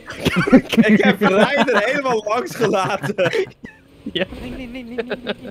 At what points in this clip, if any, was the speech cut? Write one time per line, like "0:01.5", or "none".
0:03.6

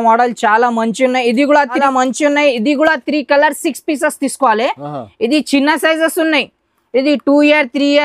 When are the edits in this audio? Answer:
0:01.8

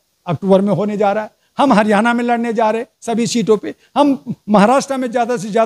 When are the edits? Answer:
none

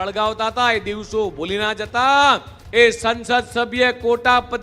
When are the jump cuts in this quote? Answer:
0:02.5

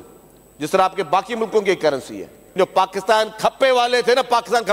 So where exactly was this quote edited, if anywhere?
0:02.5

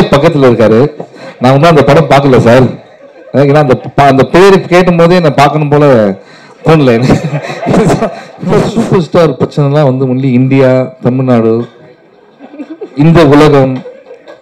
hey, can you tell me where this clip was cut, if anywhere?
0:08.3

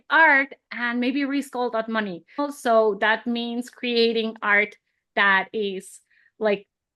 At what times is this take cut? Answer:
0:02.4

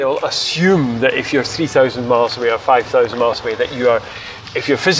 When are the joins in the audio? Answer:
none

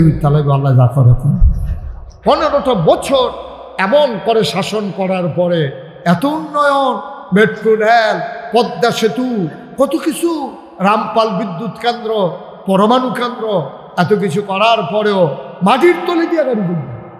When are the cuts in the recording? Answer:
0:02.0

